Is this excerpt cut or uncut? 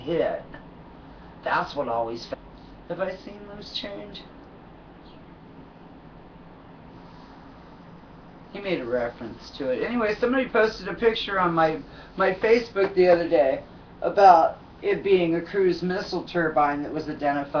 uncut